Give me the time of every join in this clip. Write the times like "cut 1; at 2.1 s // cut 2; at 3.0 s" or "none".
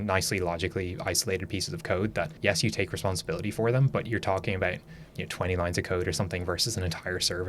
cut 1; at 2.3 s